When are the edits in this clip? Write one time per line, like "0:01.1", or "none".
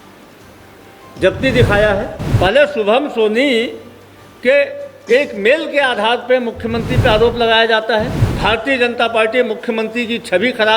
0:02.2
0:08.2